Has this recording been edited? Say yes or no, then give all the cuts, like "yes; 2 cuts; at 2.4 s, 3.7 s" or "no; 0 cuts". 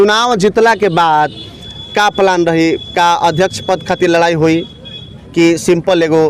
no; 0 cuts